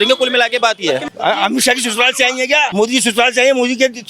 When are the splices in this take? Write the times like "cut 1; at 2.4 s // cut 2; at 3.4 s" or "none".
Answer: cut 1; at 1.1 s // cut 2; at 2.7 s